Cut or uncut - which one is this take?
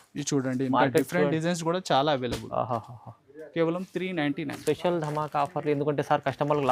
uncut